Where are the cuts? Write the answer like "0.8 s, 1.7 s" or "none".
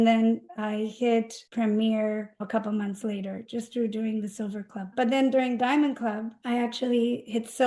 0.9 s, 2.4 s, 3.4 s, 4.9 s, 6.3 s